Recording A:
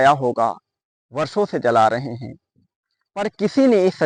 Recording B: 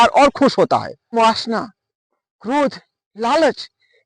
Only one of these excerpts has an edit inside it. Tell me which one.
B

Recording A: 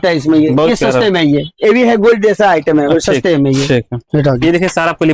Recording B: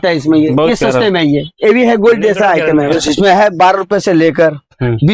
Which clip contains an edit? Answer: B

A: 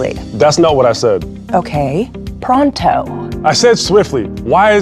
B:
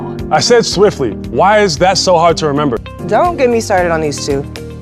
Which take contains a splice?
B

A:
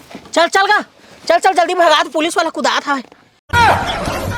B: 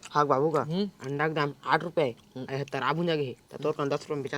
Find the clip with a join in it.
A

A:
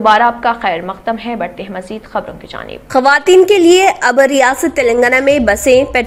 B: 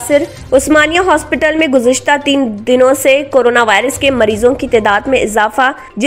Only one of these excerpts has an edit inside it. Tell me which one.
A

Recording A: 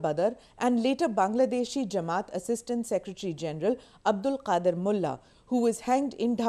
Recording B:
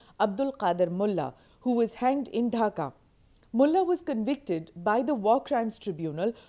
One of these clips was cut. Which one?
B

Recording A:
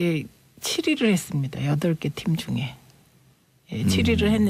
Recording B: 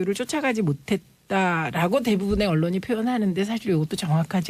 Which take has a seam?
B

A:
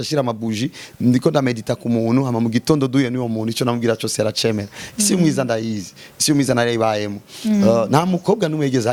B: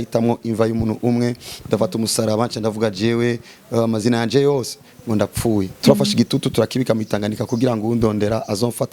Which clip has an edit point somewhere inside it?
B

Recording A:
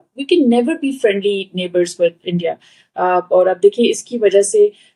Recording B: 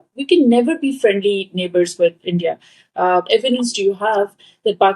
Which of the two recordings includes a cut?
B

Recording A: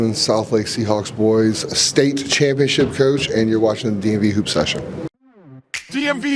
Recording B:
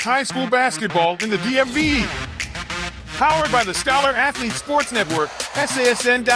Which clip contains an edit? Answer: A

